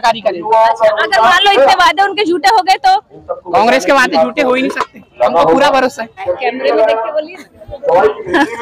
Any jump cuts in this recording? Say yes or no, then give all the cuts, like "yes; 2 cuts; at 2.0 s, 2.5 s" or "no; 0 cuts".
yes; 1 cut; at 6.3 s